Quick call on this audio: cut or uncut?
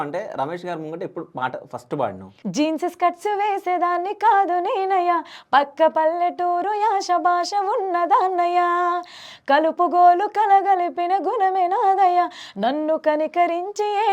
cut